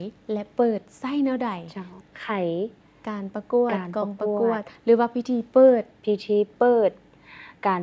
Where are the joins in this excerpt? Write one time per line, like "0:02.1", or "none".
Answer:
0:02.0